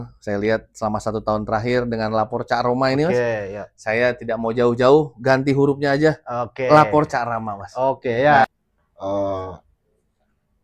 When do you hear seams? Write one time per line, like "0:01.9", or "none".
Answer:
0:08.4